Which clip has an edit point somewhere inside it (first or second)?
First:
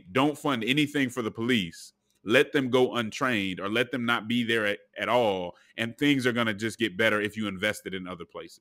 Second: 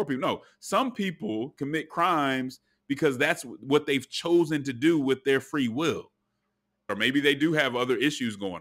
second